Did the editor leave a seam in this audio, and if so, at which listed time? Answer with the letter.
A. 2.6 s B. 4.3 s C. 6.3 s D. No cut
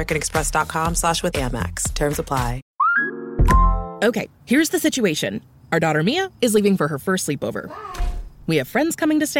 A